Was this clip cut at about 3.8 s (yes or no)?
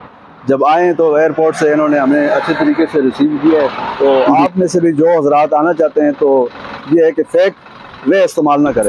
yes